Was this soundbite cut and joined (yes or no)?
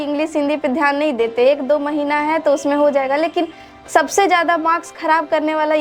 no